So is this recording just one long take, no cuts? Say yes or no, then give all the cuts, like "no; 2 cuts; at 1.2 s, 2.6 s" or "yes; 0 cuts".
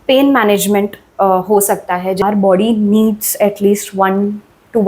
no; 1 cut; at 2.2 s